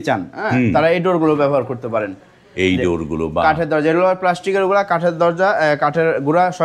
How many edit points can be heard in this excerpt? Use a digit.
0